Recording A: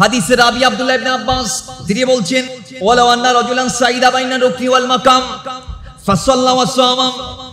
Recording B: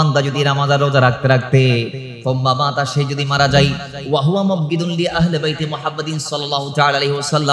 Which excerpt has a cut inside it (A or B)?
A